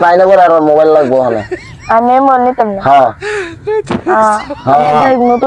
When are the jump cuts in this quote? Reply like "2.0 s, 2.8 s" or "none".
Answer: none